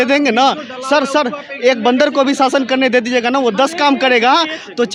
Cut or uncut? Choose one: uncut